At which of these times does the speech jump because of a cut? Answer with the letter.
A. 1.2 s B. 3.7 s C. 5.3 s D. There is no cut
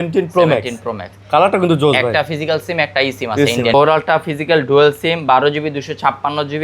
B